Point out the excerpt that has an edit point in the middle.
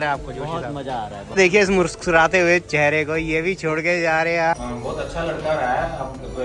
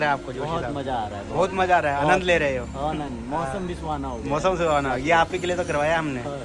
first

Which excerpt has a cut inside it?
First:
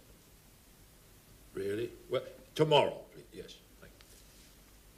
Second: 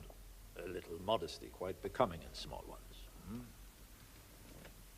second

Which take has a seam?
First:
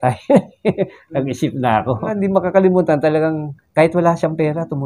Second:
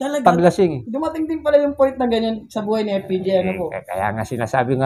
first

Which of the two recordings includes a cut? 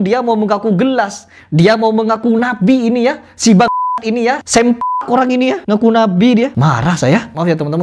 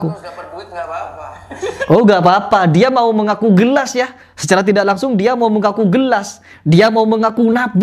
first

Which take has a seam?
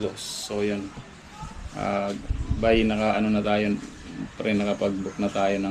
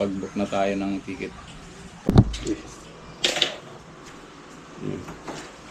second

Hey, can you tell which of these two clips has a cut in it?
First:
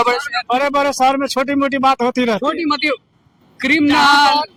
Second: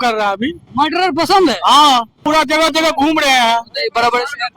second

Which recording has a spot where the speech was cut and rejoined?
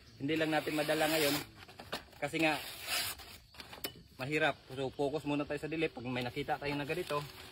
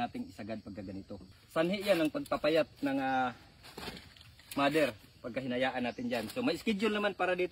second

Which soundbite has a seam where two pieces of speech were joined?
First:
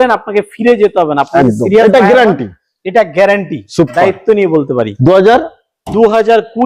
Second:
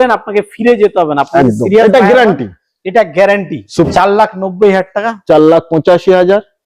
second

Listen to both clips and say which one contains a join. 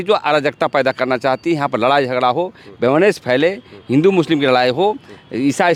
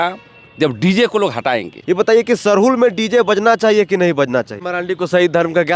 second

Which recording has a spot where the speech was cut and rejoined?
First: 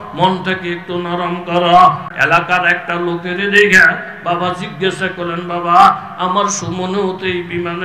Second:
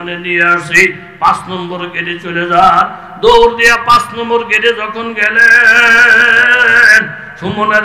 first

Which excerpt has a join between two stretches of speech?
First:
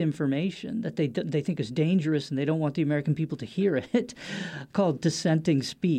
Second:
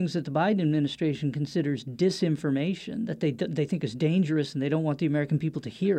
first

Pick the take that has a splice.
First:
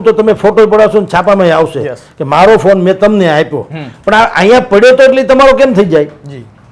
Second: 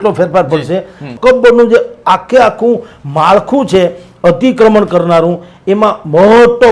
second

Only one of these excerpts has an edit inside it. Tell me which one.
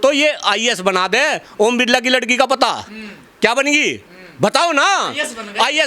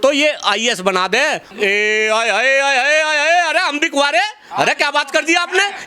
second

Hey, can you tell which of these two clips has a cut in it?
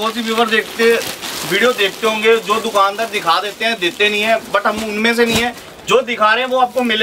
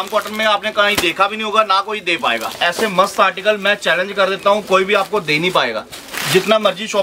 second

